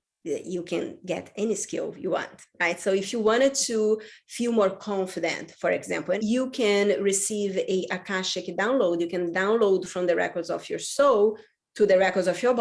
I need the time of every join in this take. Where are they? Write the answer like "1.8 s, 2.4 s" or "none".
6.2 s